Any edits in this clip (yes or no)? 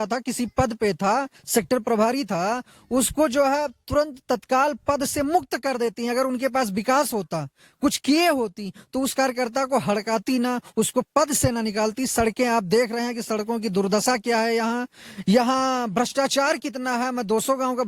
no